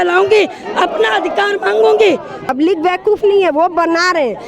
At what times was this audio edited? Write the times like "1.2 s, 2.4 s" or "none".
2.4 s

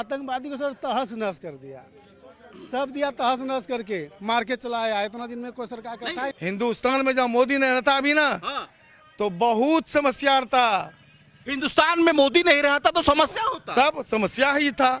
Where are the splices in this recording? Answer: 6.3 s

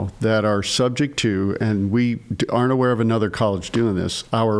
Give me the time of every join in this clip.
none

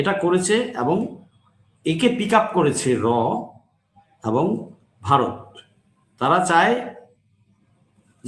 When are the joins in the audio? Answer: none

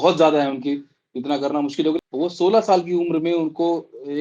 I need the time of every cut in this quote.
2.0 s

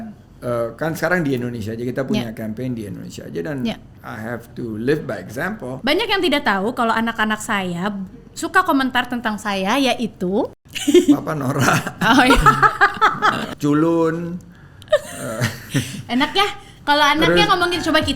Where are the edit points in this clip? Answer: 5.7 s, 10.7 s, 13.5 s

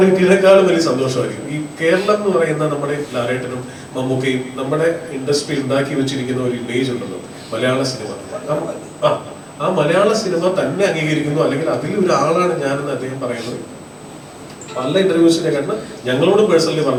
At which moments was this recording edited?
none

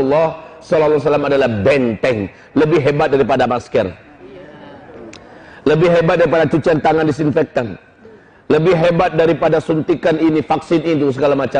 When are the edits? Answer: none

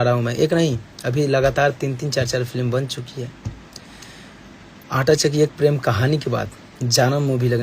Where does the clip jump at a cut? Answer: none

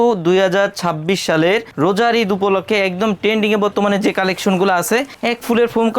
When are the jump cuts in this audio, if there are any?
none

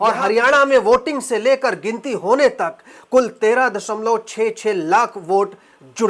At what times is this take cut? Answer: none

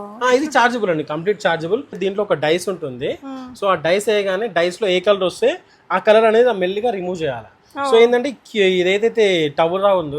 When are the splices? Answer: 2.0 s

